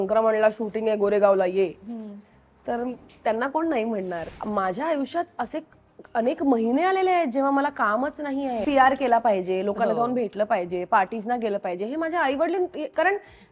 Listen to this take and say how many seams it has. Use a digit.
2